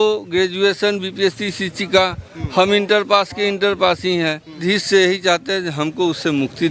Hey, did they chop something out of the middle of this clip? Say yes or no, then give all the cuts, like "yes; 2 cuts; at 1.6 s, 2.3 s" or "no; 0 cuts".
yes; 1 cut; at 4.6 s